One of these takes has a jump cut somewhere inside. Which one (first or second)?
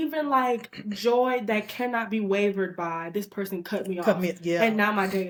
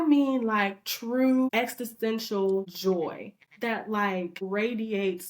second